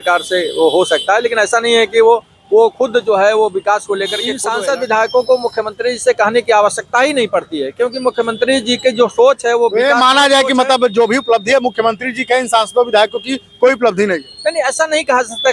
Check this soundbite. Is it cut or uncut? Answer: cut